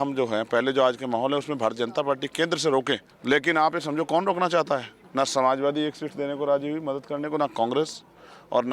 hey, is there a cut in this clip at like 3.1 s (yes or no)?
yes